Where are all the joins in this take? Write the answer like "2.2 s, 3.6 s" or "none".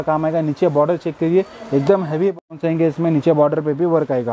2.4 s